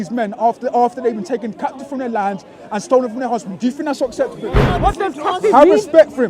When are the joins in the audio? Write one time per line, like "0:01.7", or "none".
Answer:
0:04.6